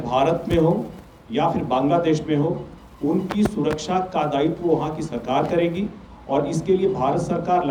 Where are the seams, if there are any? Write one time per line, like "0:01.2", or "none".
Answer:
none